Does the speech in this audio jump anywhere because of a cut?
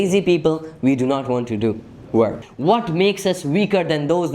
yes; 1 cut; at 2.5 s

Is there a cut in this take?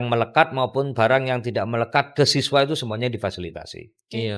no; 0 cuts

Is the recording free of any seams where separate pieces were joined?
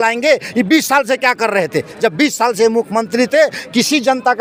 yes; 0 cuts

